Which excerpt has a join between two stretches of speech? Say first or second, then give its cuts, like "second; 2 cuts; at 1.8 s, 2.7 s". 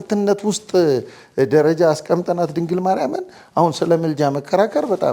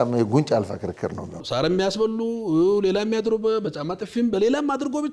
second; 1 cut; at 1.4 s